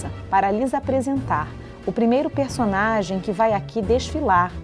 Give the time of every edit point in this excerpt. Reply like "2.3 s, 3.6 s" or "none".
none